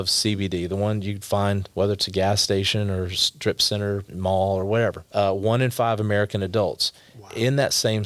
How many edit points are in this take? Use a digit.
2